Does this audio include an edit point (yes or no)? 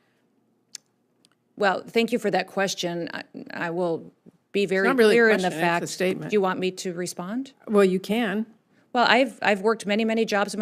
no